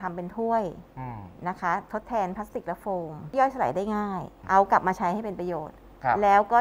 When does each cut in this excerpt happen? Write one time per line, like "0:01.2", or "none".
0:03.3
0:04.3